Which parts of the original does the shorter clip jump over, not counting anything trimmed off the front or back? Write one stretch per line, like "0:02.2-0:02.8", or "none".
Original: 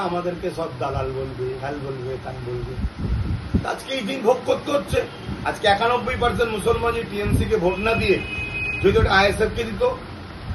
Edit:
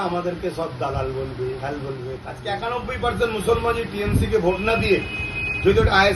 0:02.3-0:05.5